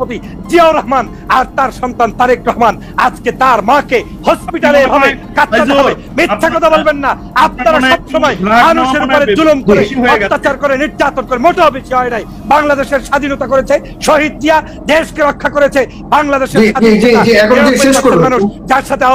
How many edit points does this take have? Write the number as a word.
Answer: zero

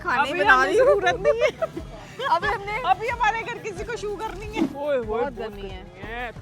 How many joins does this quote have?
one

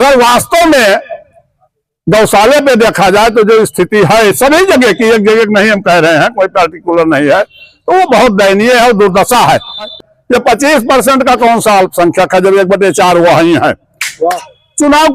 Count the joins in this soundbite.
two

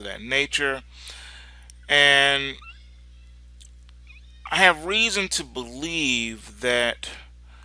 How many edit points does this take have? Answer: zero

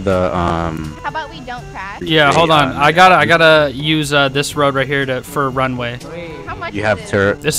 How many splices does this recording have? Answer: zero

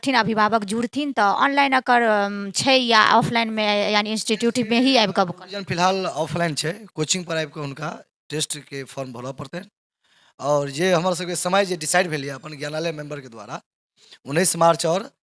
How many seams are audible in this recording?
zero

